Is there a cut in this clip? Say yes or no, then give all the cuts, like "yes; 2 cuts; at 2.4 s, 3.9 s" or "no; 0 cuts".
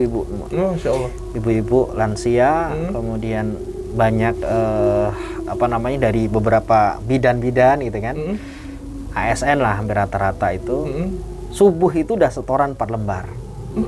no; 0 cuts